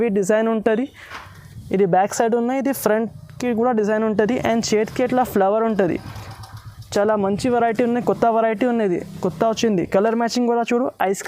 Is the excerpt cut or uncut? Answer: uncut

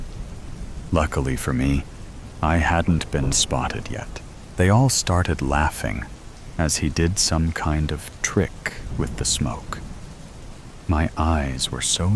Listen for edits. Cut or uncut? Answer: cut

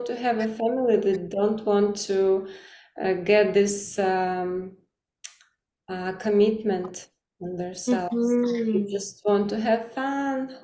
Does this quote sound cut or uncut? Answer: uncut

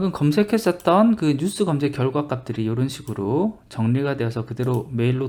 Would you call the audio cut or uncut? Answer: uncut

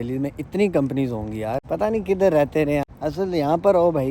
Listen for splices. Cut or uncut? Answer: cut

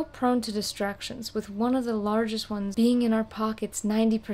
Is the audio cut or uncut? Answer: cut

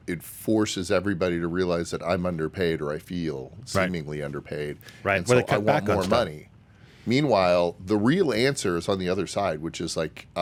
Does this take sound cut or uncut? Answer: uncut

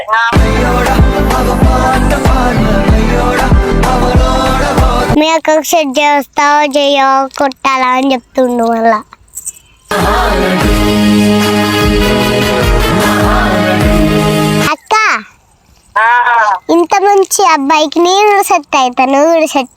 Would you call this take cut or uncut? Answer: cut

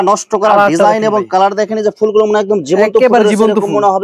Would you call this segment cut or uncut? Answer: uncut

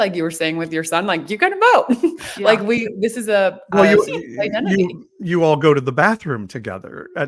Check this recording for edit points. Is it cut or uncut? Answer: uncut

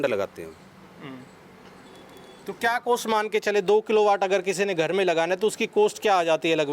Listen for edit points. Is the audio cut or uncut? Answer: uncut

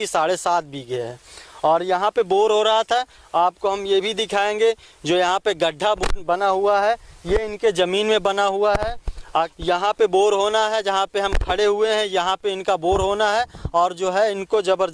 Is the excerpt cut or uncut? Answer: cut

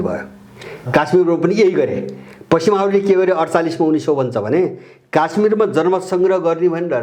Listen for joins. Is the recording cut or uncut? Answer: uncut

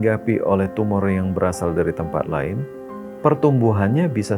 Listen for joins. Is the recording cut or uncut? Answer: uncut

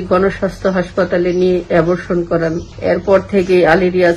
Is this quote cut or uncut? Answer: cut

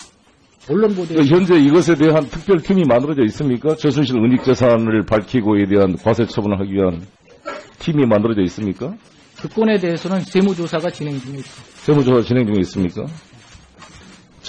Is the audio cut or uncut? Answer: cut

